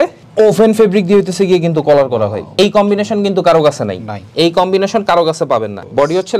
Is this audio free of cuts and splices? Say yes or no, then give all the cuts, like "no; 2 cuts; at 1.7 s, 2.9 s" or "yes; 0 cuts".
yes; 0 cuts